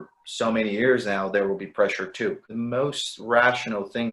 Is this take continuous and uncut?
no; 1 cut; at 2.4 s

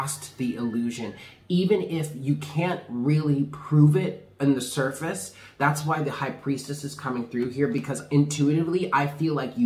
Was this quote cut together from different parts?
no; 0 cuts

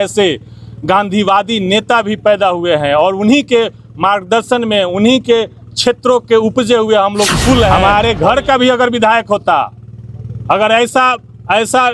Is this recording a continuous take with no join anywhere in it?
no; 1 cut; at 7.8 s

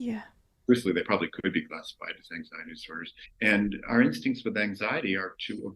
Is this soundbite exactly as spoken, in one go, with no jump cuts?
yes; 0 cuts

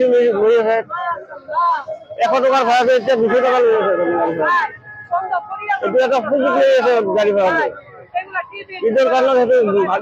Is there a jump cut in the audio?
no; 0 cuts

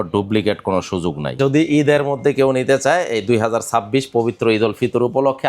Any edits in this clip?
yes; 1 cut; at 1.3 s

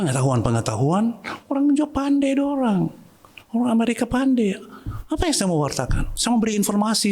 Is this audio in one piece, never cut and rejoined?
yes; 0 cuts

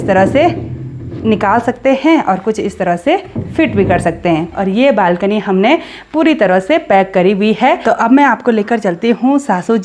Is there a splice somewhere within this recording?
yes; 2 cuts; at 4.6 s, 7.8 s

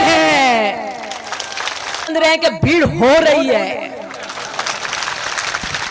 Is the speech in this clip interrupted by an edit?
yes; 1 cut; at 2.1 s

